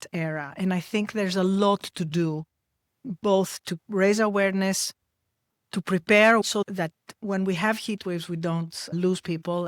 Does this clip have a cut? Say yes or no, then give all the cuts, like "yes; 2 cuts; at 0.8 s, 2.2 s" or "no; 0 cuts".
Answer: no; 0 cuts